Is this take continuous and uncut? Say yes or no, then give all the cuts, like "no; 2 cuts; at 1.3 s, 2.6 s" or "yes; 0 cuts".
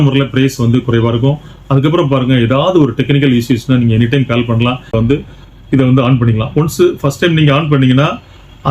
no; 1 cut; at 4.9 s